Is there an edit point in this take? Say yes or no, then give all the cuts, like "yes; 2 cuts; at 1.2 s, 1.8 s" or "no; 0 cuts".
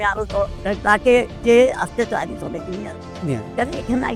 no; 0 cuts